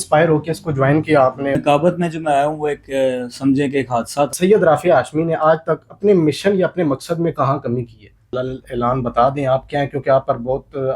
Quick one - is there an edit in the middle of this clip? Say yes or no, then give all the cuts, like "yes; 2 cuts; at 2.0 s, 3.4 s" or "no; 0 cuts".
yes; 3 cuts; at 1.5 s, 4.3 s, 8.3 s